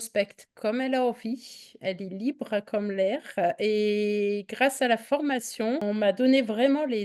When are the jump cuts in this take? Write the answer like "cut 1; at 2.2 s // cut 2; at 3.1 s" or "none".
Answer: cut 1; at 5.8 s

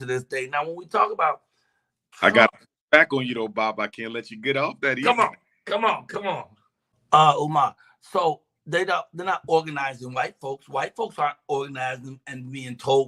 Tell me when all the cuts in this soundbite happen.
cut 1; at 6.9 s

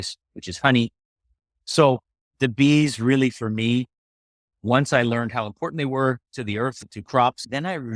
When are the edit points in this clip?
cut 1; at 1.2 s

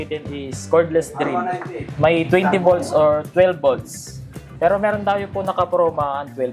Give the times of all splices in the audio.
none

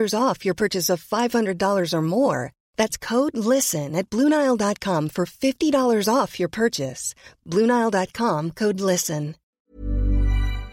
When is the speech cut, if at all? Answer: cut 1; at 9.4 s

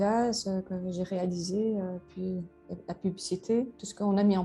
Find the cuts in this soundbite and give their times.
none

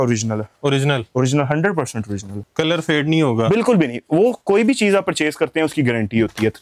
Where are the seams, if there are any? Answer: cut 1; at 2.3 s

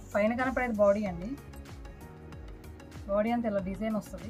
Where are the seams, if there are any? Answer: none

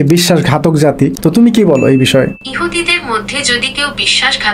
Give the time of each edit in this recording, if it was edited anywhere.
cut 1; at 1.2 s // cut 2; at 2.4 s

